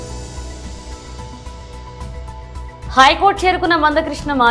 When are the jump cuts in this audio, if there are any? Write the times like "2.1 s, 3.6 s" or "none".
0.9 s, 2.4 s

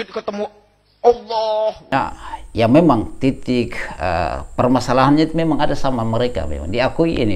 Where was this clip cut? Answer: 1.9 s

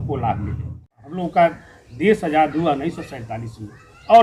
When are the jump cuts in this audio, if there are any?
1.0 s

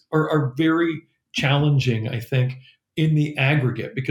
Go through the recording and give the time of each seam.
none

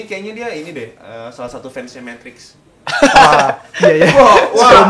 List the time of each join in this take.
none

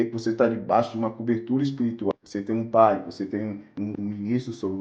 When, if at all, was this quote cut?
2.1 s, 3.9 s

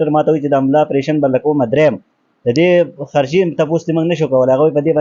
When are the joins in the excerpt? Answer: none

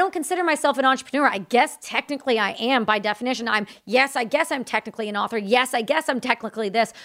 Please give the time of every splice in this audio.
none

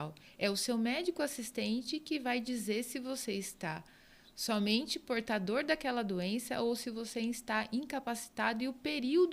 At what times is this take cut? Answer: none

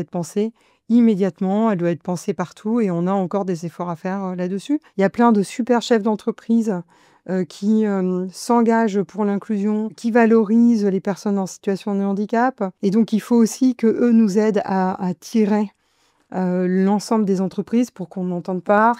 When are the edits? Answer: 4.9 s, 10.0 s, 12.7 s

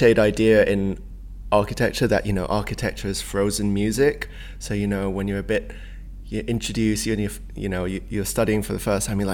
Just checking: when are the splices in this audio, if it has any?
none

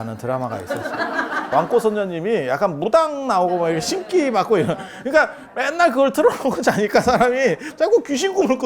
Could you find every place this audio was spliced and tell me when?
1.5 s

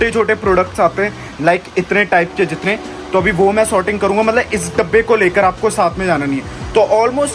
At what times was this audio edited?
none

